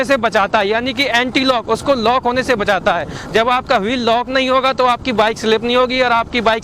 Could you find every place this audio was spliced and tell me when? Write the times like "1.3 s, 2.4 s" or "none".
none